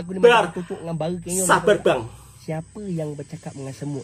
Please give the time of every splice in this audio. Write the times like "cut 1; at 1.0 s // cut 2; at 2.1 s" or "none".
cut 1; at 2.1 s